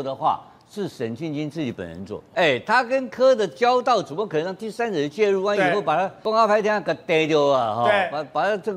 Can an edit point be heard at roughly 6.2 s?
yes; 2 cuts; at 2.3 s, 6.2 s

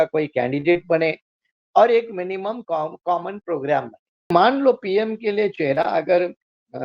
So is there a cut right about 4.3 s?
yes; 1 cut; at 4.3 s

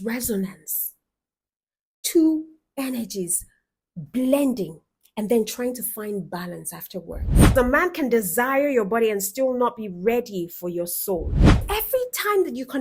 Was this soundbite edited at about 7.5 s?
yes; 2 cuts; at 7.5 s, 11.6 s

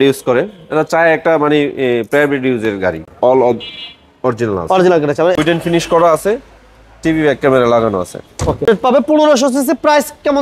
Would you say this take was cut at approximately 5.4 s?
yes; 3 cuts; at 3.0 s, 5.4 s, 8.7 s

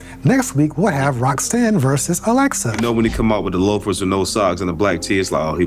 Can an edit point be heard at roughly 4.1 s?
no; 1 cut; at 2.8 s

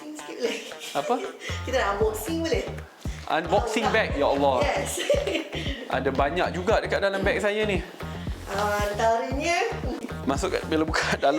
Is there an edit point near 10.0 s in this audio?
yes; 1 cut; at 10.0 s

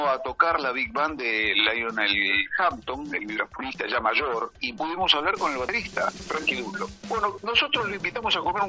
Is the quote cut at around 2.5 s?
no; 2 cuts; at 4.5 s, 7.0 s

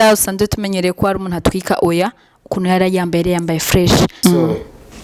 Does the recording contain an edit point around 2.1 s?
no; 1 cut; at 4.1 s

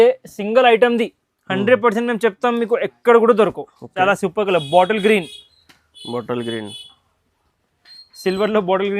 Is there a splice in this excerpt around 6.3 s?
no; 1 cut; at 3.9 s

